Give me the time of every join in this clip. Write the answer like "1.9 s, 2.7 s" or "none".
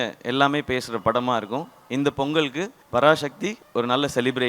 2.7 s, 3.5 s

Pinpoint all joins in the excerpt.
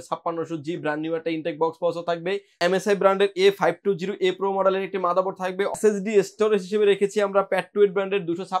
2.5 s, 5.7 s

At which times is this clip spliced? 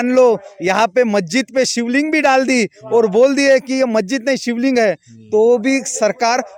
none

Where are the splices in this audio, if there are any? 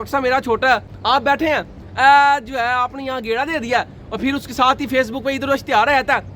0.9 s

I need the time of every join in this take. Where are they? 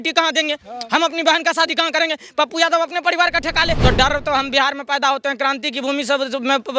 3.8 s

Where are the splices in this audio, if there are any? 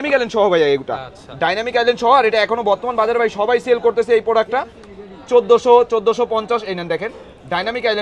none

